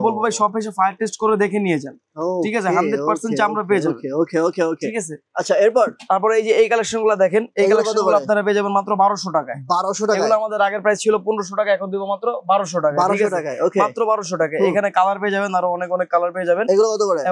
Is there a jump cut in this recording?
no; 0 cuts

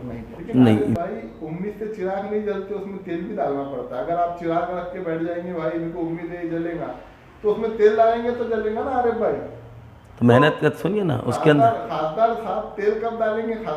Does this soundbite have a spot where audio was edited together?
yes; 1 cut; at 1.0 s

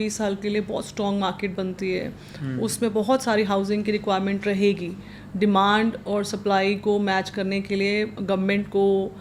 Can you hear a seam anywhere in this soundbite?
no; 0 cuts

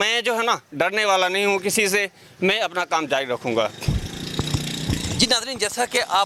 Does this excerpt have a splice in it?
no; 0 cuts

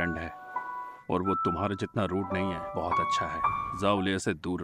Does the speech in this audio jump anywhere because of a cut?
yes; 2 cuts; at 2.6 s, 3.7 s

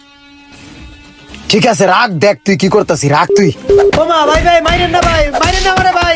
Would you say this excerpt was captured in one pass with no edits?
no; 1 cut; at 3.9 s

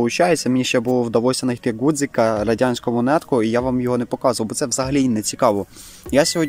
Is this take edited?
no; 0 cuts

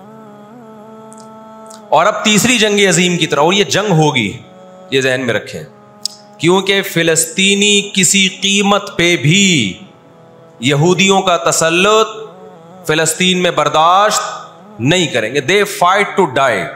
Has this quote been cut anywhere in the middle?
yes; 1 cut; at 1.7 s

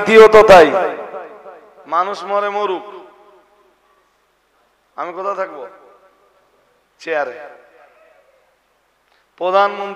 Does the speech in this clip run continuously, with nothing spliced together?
yes; 0 cuts

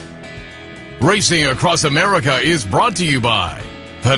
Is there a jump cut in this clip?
yes; 1 cut; at 1.0 s

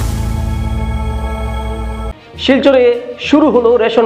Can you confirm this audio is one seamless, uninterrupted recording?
no; 1 cut; at 2.1 s

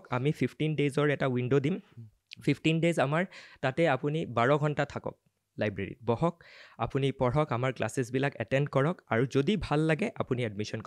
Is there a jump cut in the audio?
no; 0 cuts

